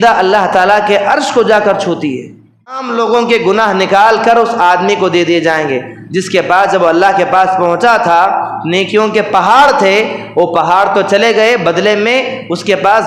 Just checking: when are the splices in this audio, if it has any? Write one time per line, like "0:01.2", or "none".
0:02.8